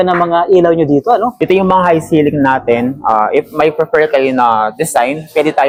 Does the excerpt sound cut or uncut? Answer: uncut